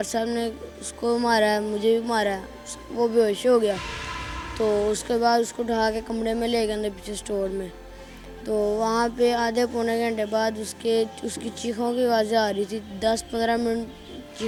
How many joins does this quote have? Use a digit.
0